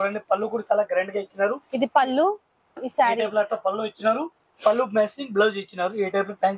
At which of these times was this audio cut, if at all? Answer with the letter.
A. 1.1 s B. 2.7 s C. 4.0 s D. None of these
D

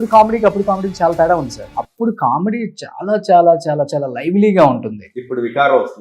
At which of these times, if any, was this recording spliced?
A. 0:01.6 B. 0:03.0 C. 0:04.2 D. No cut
A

